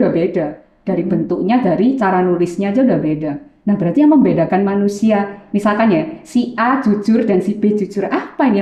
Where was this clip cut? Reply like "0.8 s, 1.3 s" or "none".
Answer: none